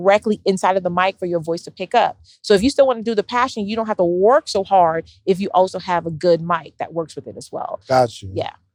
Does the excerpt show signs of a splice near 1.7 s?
no; 0 cuts

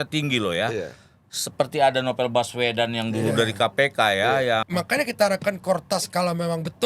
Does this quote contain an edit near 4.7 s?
yes; 1 cut; at 4.7 s

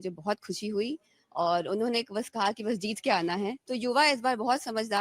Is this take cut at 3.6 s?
yes; 1 cut; at 3.6 s

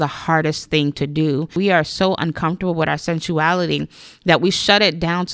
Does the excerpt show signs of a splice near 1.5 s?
yes; 1 cut; at 1.5 s

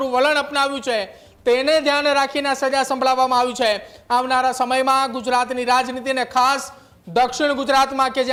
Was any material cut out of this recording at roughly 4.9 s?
no; 0 cuts

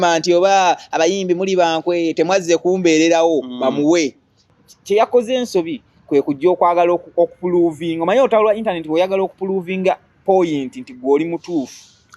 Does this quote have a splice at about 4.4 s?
yes; 1 cut; at 4.4 s

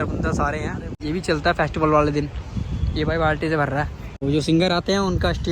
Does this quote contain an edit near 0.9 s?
yes; 2 cuts; at 0.9 s, 4.2 s

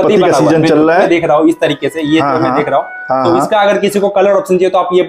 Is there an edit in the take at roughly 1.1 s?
yes; 1 cut; at 1.1 s

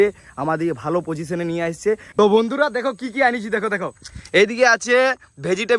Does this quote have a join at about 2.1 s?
yes; 1 cut; at 2.1 s

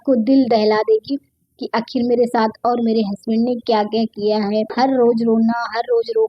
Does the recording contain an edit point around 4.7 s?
yes; 1 cut; at 4.7 s

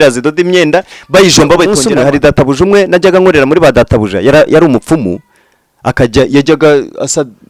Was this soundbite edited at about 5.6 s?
no; 1 cut; at 1.8 s

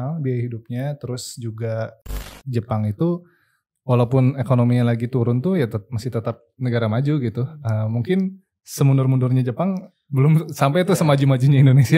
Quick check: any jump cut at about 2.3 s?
yes; 1 cut; at 2.3 s

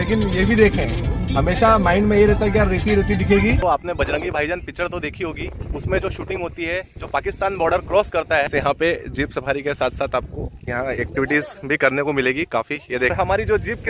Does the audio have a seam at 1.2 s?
no; 3 cuts; at 3.6 s, 8.5 s, 13.1 s

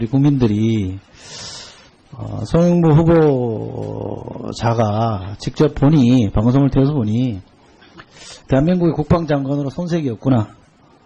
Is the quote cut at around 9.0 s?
no; 1 cut; at 4.2 s

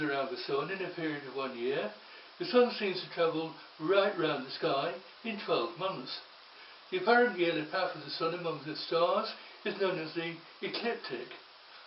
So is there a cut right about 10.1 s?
yes; 1 cut; at 10.1 s

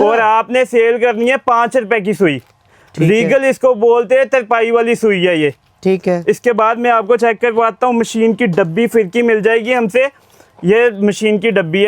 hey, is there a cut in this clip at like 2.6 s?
no; 0 cuts

